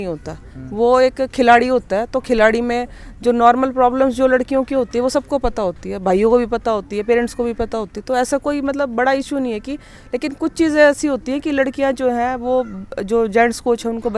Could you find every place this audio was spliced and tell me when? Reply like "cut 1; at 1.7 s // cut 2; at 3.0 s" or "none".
none